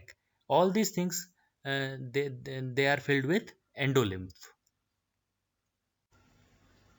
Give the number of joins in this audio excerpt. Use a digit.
1